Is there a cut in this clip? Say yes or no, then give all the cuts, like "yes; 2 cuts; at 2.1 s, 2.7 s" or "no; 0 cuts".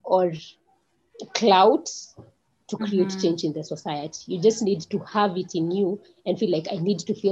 no; 0 cuts